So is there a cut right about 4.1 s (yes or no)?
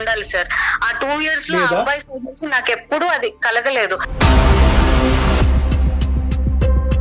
yes